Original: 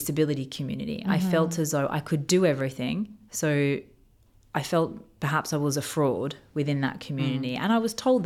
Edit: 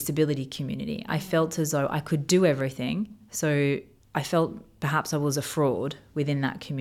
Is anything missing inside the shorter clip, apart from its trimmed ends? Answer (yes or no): yes